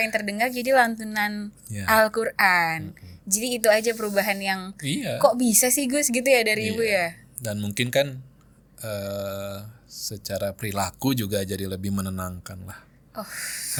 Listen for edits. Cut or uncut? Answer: uncut